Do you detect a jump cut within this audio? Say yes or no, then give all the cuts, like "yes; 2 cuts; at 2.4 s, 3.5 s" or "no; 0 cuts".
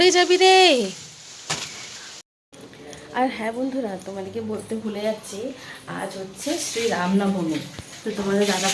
yes; 1 cut; at 2.2 s